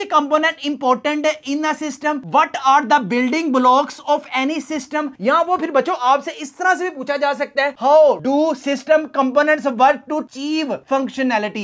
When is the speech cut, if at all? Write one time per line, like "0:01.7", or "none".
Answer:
none